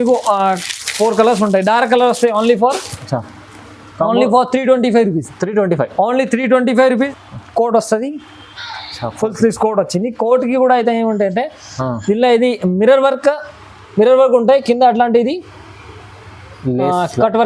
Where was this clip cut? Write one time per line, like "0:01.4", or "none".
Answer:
0:07.1